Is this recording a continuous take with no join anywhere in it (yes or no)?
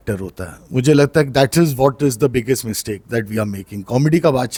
yes